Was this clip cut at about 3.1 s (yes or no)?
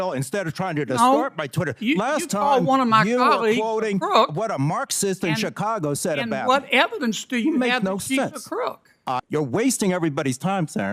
no